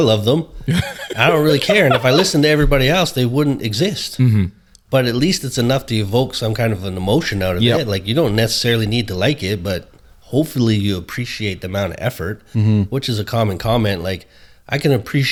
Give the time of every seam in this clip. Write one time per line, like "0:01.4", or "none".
none